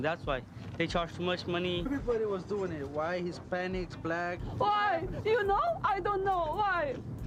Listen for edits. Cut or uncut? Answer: uncut